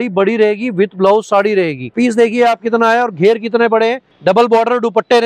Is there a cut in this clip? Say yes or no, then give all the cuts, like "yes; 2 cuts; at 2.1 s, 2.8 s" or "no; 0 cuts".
yes; 1 cut; at 1.9 s